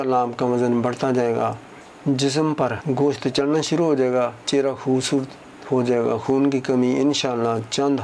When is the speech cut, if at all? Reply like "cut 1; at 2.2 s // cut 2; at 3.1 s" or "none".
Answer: cut 1; at 2.8 s